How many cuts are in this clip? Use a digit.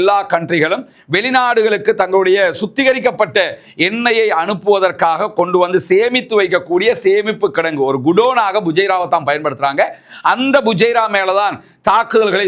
0